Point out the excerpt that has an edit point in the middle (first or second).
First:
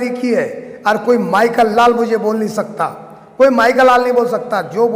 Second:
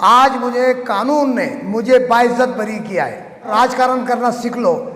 second